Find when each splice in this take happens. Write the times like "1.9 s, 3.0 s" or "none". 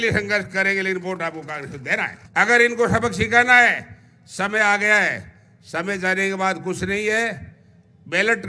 2.2 s